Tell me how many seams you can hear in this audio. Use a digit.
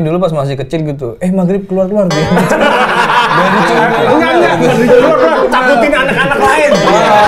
0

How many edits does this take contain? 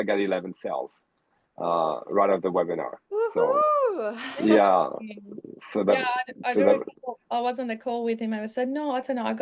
0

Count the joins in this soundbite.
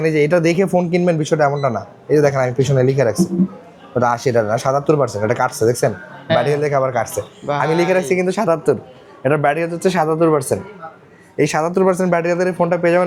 0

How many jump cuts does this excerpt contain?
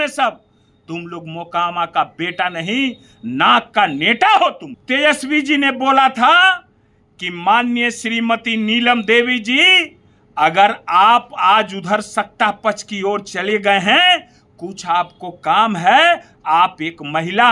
1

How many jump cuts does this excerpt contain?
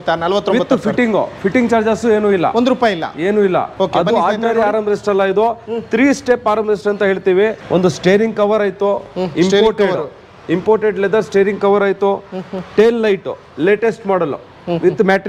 2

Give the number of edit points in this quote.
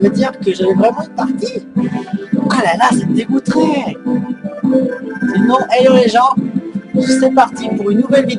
1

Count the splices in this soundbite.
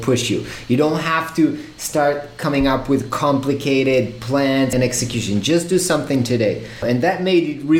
1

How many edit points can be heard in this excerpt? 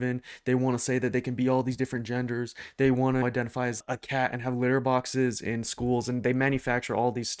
1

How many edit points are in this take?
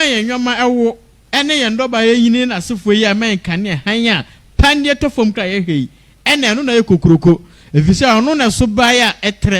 0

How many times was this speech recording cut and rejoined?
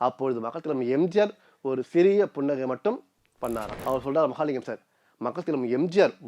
1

